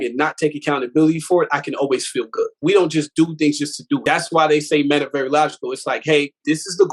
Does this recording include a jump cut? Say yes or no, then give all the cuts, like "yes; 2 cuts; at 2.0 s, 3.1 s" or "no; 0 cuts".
yes; 2 cuts; at 2.5 s, 4.0 s